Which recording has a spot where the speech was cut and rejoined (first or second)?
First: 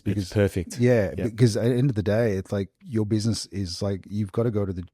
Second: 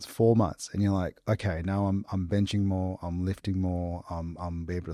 first